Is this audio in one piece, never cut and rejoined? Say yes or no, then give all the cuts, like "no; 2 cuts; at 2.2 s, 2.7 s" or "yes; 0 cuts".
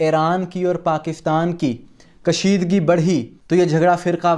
yes; 0 cuts